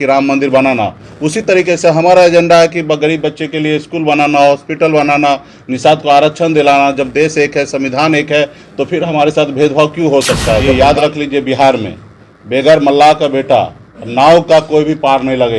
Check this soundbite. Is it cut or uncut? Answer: cut